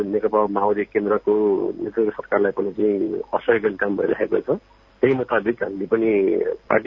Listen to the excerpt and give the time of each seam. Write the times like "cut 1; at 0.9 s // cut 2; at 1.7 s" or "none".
none